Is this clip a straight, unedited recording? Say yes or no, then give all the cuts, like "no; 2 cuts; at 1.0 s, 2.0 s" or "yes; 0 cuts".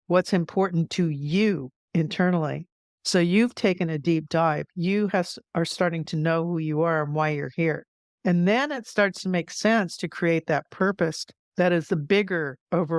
yes; 0 cuts